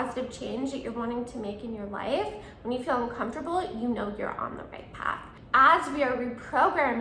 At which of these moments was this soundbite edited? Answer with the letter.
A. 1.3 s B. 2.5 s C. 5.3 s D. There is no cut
C